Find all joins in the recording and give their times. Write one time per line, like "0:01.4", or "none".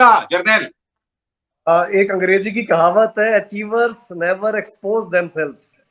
none